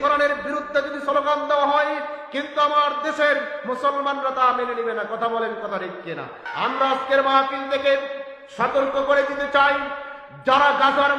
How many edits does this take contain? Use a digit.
1